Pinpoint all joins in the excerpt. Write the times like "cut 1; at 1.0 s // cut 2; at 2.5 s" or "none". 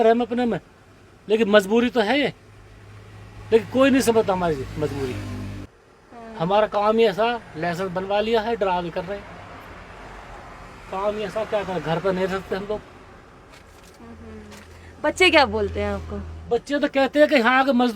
cut 1; at 5.5 s